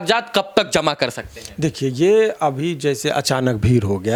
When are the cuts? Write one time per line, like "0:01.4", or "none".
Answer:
none